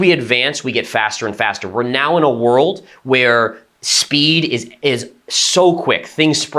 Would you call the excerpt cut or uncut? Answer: uncut